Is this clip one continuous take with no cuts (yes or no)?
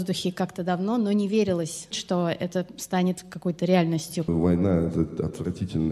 no